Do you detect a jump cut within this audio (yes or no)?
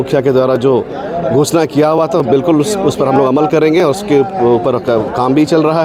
no